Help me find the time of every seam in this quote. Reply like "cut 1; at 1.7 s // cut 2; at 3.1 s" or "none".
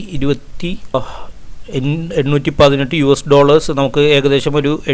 cut 1; at 0.9 s